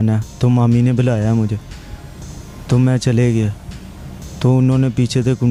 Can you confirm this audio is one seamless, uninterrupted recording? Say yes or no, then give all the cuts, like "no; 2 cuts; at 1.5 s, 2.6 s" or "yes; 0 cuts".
yes; 0 cuts